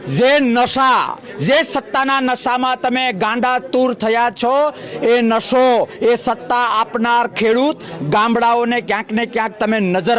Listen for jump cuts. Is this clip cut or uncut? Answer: uncut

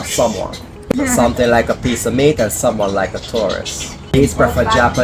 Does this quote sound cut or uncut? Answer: cut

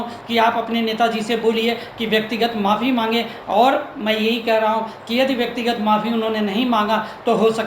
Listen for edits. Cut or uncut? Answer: uncut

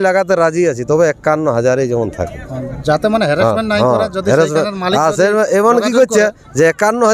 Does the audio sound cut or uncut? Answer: uncut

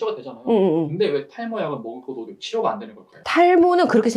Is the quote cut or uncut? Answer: uncut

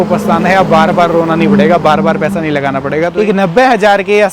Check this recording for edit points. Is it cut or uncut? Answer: cut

